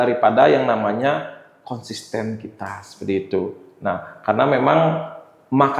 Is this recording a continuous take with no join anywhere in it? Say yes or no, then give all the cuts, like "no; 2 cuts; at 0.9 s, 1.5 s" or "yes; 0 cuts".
yes; 0 cuts